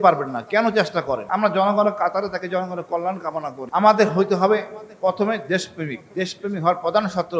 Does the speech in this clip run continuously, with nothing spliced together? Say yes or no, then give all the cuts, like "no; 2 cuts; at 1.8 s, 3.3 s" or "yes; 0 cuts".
no; 2 cuts; at 1.2 s, 3.6 s